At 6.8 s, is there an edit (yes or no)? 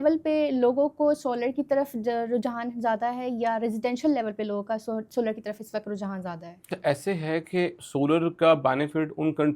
yes